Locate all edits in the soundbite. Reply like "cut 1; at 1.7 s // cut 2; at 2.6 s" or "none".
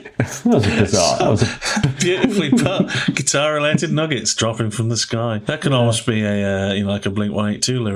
cut 1; at 5.4 s

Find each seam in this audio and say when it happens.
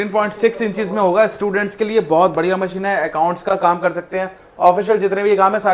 none

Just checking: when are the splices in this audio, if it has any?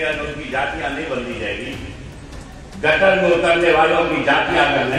none

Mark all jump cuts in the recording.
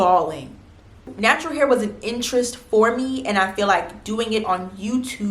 cut 1; at 1.0 s

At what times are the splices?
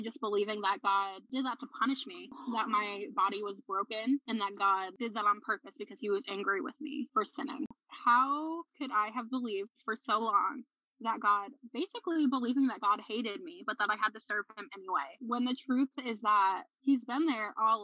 cut 1; at 7.7 s

